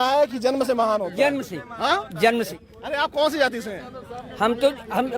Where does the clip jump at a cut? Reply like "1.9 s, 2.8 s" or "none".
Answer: 2.6 s